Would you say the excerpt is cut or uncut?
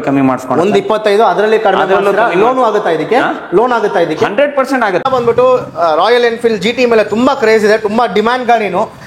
cut